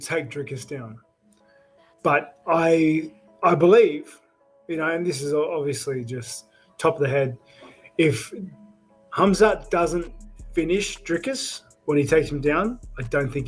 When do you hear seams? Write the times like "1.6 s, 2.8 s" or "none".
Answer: none

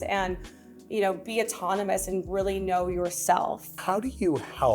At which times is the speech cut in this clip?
3.7 s

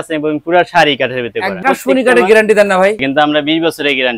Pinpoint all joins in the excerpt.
1.6 s, 3.0 s

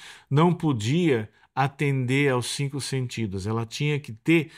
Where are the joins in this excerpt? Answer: none

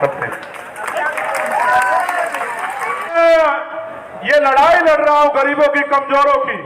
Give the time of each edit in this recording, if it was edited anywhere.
3.1 s

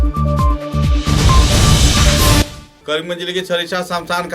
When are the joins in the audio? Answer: 2.6 s

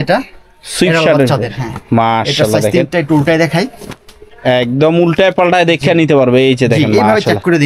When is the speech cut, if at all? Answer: none

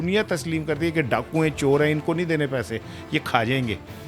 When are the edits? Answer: none

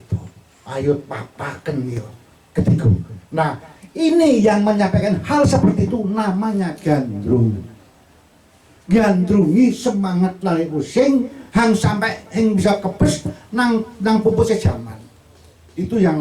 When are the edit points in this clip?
none

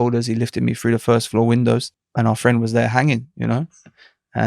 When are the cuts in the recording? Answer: 2.0 s

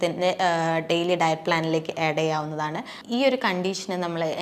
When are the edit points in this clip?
3.0 s

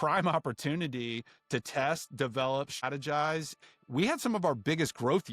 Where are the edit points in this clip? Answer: 2.8 s, 3.6 s

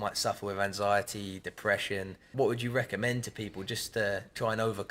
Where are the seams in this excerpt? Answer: 2.3 s

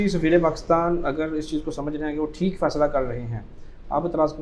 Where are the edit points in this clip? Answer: none

